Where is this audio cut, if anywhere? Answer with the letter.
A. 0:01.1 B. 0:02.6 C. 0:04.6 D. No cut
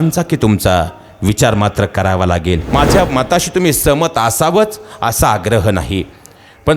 B